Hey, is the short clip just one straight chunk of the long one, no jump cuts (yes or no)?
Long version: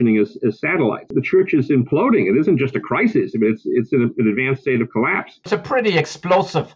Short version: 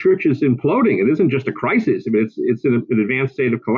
yes